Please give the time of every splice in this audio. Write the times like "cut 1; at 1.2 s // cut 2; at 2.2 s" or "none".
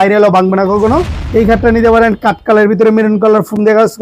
cut 1; at 1.2 s